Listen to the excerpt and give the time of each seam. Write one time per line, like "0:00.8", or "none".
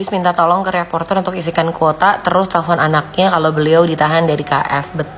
none